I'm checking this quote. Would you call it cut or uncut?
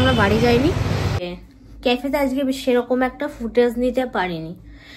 cut